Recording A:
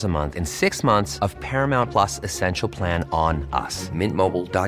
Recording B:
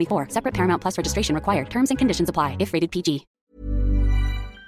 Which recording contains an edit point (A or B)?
B